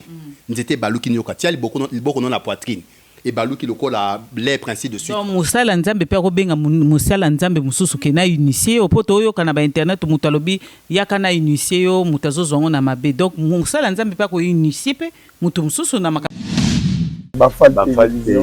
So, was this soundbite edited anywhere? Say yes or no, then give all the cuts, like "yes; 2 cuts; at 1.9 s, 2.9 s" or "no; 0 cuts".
yes; 1 cut; at 16.2 s